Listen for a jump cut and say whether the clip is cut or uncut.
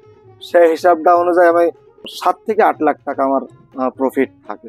cut